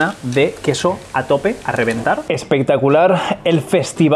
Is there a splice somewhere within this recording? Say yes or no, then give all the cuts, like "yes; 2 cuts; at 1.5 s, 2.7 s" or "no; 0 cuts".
yes; 1 cut; at 2.2 s